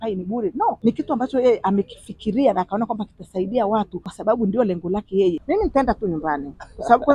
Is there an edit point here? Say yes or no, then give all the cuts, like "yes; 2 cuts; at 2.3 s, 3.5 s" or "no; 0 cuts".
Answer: yes; 3 cuts; at 0.8 s, 4.0 s, 5.4 s